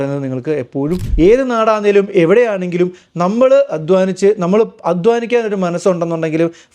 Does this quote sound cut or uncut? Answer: cut